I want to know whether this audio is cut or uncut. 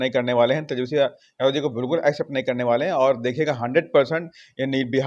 uncut